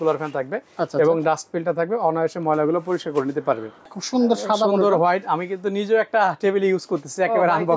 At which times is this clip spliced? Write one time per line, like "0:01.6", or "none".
0:03.9